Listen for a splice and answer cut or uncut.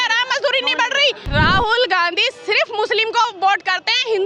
cut